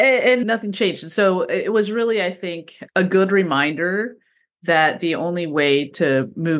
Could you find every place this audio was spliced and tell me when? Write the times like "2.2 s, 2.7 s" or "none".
none